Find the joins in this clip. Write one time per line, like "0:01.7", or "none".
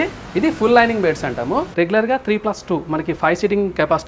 0:01.7